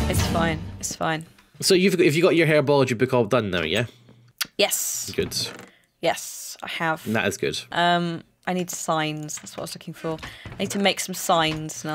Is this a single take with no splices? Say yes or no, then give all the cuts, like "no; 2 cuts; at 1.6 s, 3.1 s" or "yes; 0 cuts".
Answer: no; 1 cut; at 7.6 s